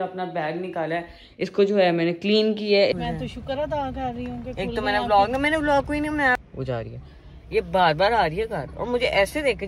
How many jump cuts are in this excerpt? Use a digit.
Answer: 2